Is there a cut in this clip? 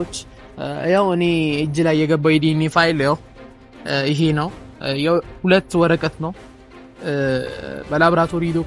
no; 0 cuts

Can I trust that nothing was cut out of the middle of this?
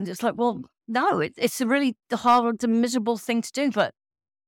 yes; 0 cuts

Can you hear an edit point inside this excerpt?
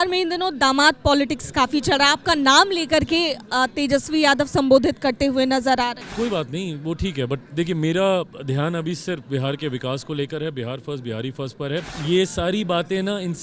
yes; 2 cuts; at 6.0 s, 11.9 s

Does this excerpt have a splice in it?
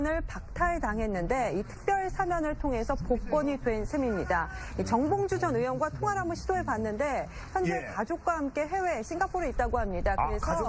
no; 0 cuts

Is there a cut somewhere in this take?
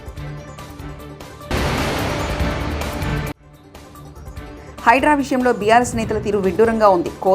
yes; 2 cuts; at 1.5 s, 3.4 s

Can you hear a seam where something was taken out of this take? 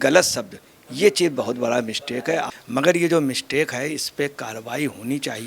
yes; 1 cut; at 2.5 s

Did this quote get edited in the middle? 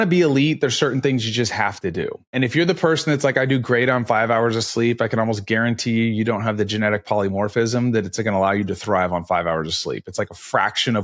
yes; 1 cut; at 2.3 s

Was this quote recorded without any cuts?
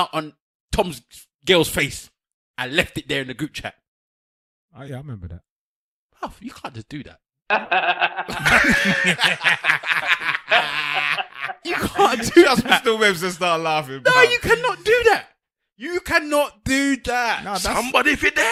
yes; 0 cuts

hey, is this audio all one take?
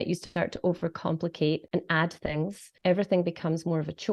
no; 2 cuts; at 1.6 s, 2.6 s

